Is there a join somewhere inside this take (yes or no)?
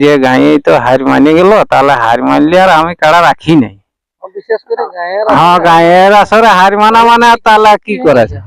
no